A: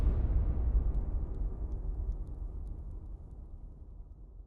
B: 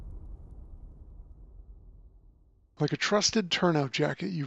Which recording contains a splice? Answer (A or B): B